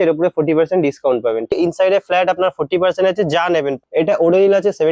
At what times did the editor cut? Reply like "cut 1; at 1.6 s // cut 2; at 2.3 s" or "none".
cut 1; at 1.5 s // cut 2; at 3.8 s